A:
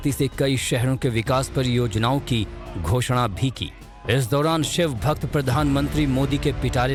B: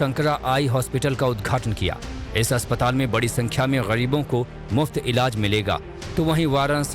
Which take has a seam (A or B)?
B